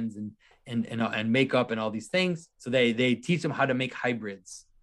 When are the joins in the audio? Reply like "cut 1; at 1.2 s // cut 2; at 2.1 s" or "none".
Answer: cut 1; at 2.5 s